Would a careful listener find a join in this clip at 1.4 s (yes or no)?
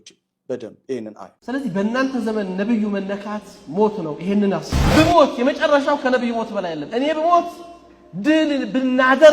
yes